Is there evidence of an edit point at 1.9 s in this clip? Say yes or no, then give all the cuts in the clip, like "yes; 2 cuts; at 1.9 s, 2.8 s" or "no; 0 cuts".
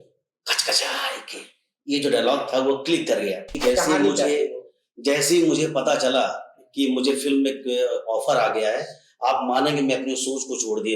no; 1 cut; at 3.6 s